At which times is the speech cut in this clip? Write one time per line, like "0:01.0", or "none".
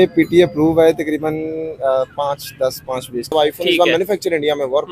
0:03.3